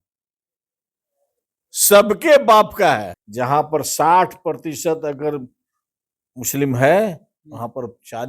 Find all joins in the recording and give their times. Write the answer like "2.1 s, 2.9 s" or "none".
3.2 s